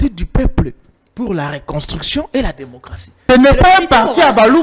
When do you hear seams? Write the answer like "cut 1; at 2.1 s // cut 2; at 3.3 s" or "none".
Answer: cut 1; at 3.3 s